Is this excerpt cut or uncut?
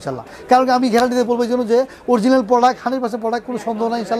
uncut